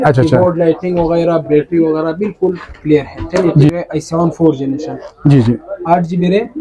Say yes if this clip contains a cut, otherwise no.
yes